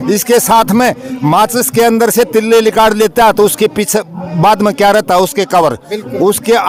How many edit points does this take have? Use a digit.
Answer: 0